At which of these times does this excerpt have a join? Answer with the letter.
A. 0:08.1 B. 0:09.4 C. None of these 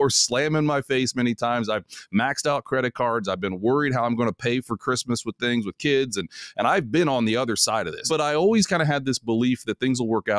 A